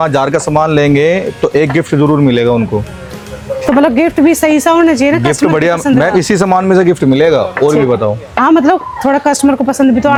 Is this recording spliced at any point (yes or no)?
no